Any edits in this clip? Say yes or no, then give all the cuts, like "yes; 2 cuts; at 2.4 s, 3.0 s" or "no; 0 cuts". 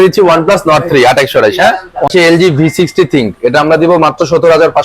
yes; 1 cut; at 2.1 s